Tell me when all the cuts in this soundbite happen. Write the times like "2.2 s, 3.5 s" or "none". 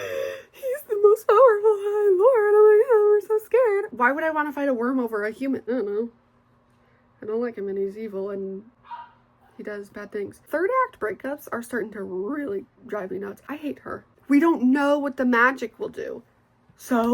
3.9 s, 5.6 s, 10.4 s, 13.7 s